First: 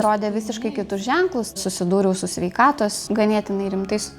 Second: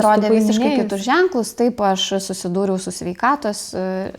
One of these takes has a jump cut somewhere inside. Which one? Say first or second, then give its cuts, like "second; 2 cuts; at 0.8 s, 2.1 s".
first; 2 cuts; at 1.6 s, 3.0 s